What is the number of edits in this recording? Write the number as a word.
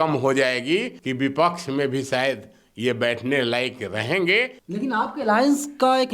two